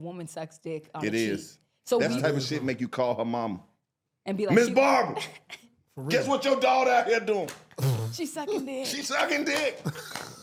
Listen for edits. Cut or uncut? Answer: uncut